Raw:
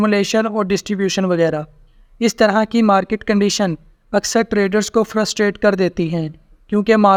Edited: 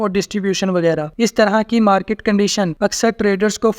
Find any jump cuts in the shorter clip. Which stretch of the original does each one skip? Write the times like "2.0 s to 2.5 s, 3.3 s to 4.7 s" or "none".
1.6 s to 2.1 s, 3.7 s to 4.0 s